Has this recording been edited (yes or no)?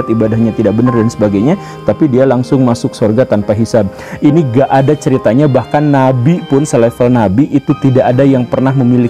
yes